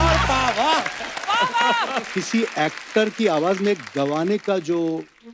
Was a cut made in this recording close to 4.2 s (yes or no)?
no